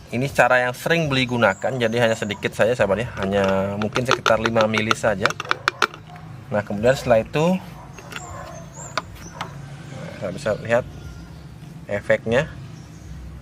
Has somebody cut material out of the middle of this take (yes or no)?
no